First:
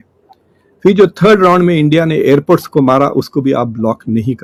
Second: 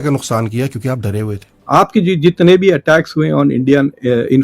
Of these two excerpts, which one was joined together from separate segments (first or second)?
second